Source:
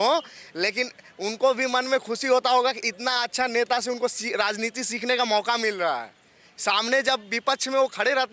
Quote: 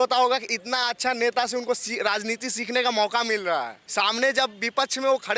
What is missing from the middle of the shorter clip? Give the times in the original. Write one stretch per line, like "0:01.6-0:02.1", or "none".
0:06.1-0:06.5